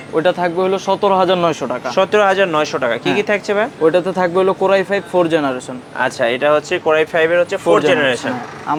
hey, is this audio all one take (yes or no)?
yes